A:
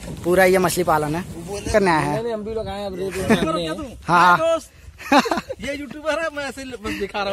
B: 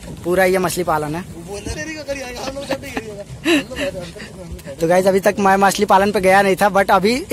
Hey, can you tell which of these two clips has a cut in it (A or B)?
A